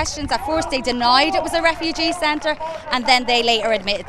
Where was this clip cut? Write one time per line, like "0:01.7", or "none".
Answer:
none